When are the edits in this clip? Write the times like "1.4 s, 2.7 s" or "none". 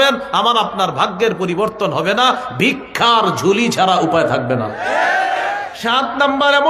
5.7 s